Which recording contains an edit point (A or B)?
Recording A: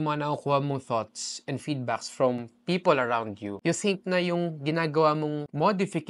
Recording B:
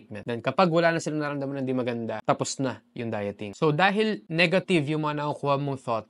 B